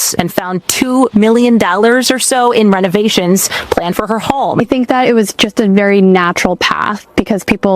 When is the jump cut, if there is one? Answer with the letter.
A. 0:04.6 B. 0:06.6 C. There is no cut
A